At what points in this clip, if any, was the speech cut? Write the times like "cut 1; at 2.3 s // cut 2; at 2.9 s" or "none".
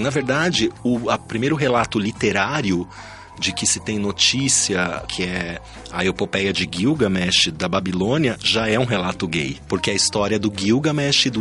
cut 1; at 1.2 s // cut 2; at 5.0 s // cut 3; at 9.6 s